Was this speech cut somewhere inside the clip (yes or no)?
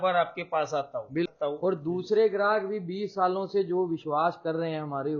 yes